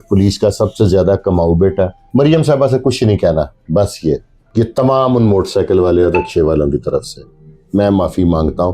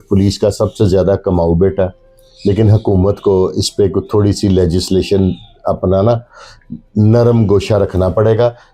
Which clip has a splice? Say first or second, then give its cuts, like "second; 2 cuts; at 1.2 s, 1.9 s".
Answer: first; 2 cuts; at 2.0 s, 4.4 s